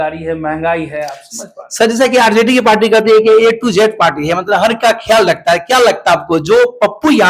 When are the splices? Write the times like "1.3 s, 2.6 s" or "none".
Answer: none